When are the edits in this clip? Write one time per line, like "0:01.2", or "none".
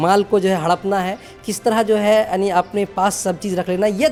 none